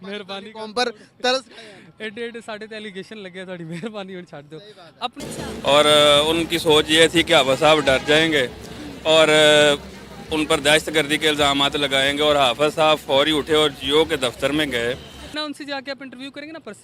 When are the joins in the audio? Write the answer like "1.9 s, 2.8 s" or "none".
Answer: 5.2 s, 15.3 s